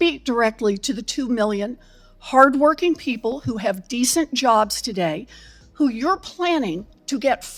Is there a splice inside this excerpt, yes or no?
no